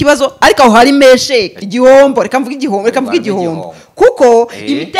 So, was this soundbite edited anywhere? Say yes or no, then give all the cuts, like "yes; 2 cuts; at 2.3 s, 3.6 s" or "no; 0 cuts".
yes; 1 cut; at 1.6 s